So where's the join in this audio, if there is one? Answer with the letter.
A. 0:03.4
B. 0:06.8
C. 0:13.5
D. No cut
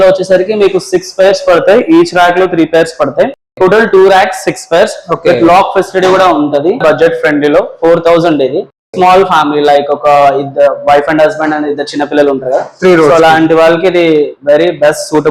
B